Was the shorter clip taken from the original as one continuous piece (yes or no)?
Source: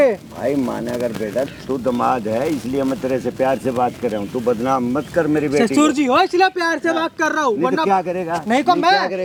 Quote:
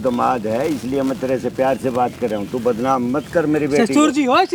yes